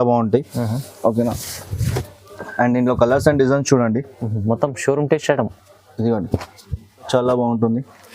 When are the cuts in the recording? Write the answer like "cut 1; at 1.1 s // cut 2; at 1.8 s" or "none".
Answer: cut 1; at 7.1 s